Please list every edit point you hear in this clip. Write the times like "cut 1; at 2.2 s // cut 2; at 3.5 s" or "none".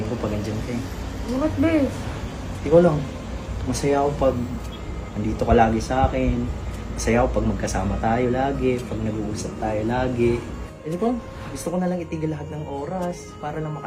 cut 1; at 10.6 s // cut 2; at 11.3 s